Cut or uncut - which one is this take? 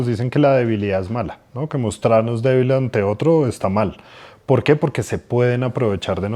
uncut